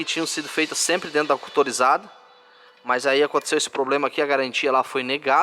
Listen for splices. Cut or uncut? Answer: uncut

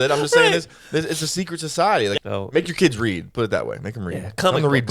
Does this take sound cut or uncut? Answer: cut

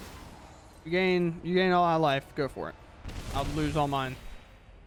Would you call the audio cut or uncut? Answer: uncut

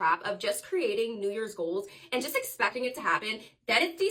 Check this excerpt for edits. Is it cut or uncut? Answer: uncut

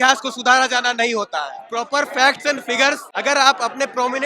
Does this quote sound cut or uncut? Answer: cut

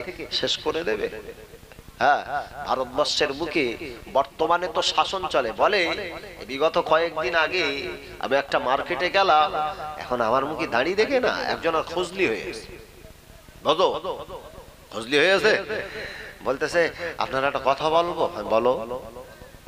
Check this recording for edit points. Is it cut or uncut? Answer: uncut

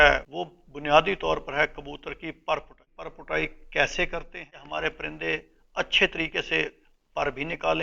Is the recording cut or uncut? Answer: cut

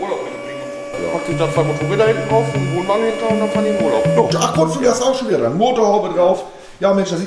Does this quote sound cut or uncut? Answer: cut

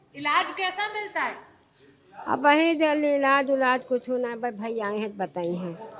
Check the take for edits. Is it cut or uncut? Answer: uncut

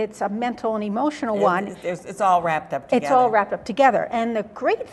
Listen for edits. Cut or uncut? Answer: uncut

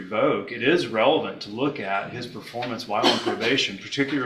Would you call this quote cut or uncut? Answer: uncut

